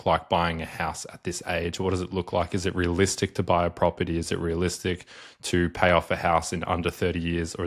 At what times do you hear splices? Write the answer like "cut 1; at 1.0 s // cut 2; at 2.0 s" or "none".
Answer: none